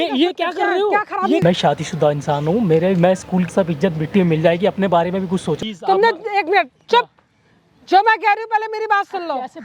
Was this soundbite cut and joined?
yes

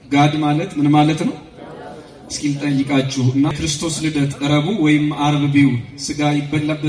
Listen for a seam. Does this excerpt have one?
yes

